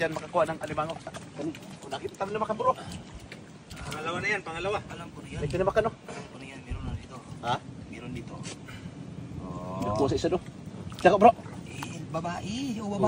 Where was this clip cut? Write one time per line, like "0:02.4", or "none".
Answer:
0:01.2